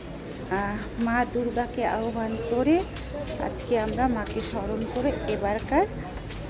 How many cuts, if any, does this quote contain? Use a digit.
0